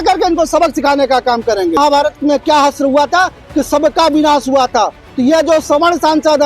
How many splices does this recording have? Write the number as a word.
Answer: one